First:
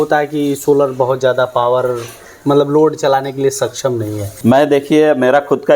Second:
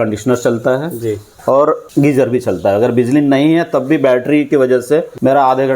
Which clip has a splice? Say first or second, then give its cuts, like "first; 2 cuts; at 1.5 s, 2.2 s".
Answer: second; 3 cuts; at 1.3 s, 1.8 s, 4.8 s